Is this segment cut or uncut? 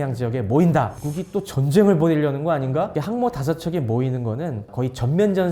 cut